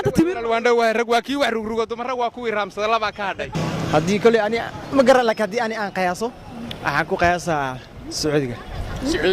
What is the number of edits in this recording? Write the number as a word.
one